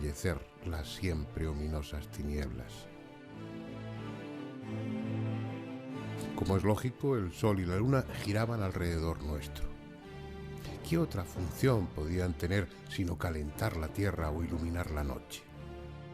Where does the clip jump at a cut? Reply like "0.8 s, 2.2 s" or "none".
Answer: 10.9 s